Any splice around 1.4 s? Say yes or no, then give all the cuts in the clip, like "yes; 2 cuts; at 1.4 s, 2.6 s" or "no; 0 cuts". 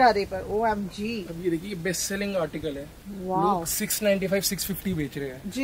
no; 0 cuts